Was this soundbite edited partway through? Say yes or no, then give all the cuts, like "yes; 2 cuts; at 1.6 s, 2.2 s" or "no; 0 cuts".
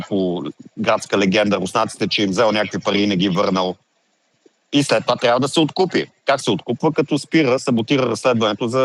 no; 0 cuts